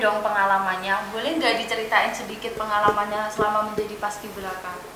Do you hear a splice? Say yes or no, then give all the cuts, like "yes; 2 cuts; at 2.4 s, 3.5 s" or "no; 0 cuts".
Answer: no; 0 cuts